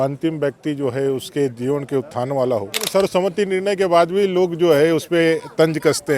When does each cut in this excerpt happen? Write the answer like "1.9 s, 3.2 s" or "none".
2.9 s